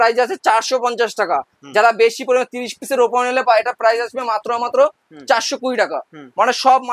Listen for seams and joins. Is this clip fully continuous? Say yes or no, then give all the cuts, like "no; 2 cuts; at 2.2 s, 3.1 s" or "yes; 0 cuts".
yes; 0 cuts